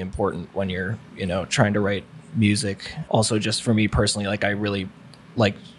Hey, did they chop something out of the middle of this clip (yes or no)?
yes